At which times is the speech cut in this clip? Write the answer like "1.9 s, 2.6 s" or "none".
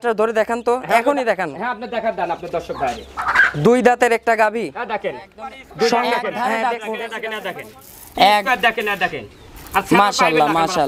6.3 s